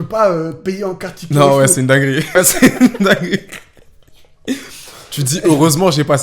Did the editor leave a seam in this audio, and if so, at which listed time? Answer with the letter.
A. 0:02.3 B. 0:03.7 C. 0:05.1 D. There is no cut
A